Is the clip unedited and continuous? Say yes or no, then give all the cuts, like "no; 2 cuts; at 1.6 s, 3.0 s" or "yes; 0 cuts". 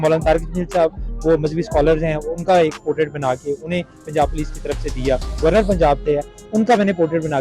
no; 1 cut; at 5.4 s